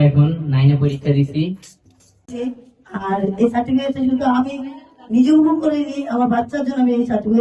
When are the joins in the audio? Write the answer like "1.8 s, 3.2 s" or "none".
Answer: 2.2 s